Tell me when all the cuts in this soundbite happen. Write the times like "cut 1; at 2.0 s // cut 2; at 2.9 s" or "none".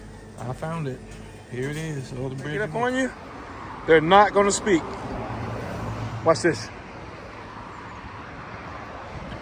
cut 1; at 2.5 s